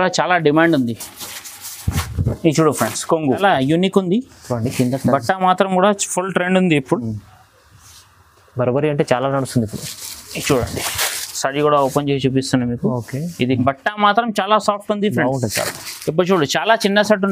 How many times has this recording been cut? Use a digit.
2